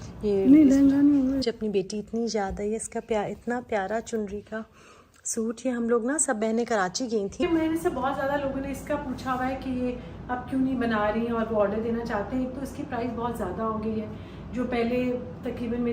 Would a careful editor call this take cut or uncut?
cut